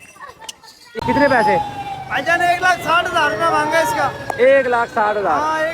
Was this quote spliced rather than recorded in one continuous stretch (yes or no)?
yes